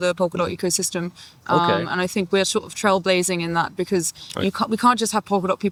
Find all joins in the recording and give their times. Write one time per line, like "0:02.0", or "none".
none

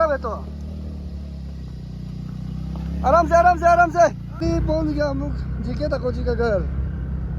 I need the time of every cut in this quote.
0:04.4

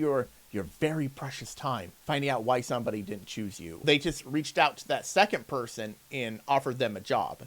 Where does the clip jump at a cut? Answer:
0:01.9
0:03.8

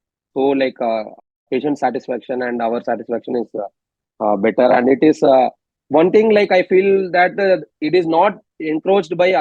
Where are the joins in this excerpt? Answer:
none

